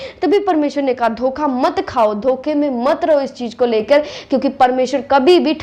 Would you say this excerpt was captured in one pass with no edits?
yes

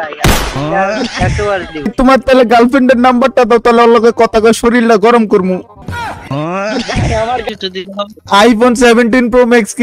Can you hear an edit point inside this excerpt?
yes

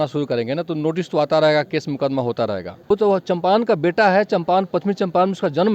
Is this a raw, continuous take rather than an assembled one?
no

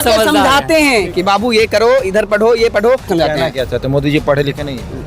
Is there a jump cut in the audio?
yes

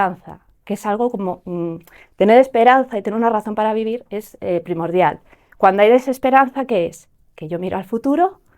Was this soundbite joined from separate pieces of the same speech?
no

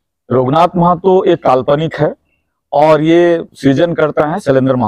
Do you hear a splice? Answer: no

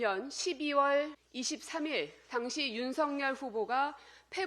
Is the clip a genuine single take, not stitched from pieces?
no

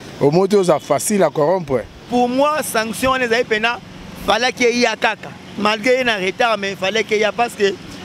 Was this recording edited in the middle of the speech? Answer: yes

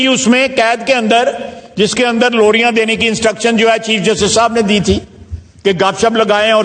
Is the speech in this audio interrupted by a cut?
no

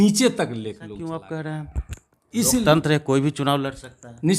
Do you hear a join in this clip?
yes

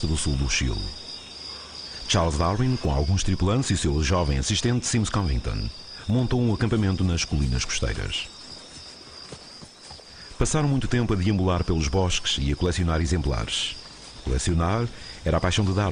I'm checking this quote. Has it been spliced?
yes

